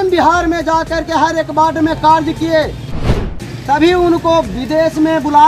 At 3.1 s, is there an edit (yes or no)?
yes